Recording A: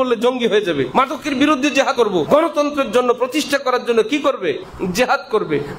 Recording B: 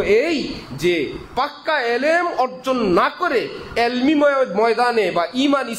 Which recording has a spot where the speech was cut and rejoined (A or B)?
A